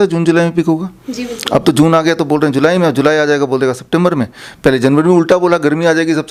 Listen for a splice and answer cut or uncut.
uncut